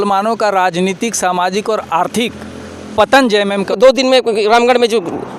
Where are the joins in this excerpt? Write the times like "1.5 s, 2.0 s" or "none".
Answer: 3.7 s